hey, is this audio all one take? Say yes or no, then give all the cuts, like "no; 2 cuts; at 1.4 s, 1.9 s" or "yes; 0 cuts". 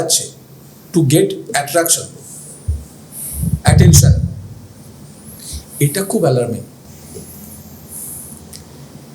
yes; 0 cuts